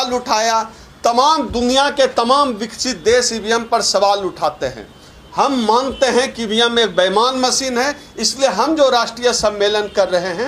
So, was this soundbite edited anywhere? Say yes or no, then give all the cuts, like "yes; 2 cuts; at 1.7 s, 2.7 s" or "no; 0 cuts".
no; 0 cuts